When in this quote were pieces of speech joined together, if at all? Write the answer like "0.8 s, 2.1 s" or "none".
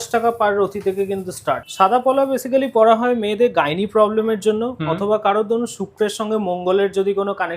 1.6 s